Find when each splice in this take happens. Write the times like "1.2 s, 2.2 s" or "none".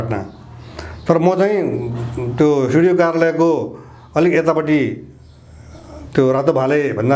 none